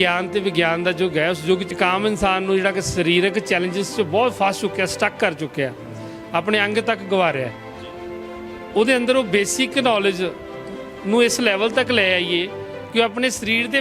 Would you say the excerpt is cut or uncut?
cut